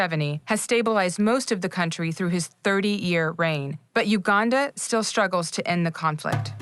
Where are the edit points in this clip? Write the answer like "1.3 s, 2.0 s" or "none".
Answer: none